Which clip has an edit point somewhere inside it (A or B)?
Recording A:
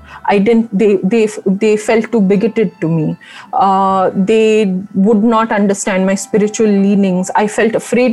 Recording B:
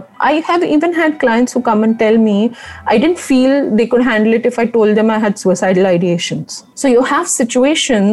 B